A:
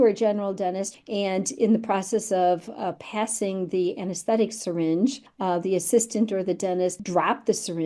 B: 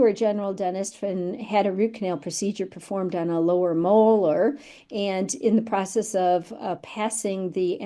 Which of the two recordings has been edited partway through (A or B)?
A